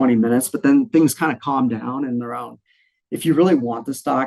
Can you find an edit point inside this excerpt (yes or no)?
no